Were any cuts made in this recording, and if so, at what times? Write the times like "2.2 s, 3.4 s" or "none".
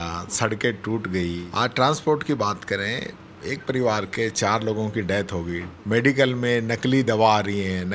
1.4 s, 5.7 s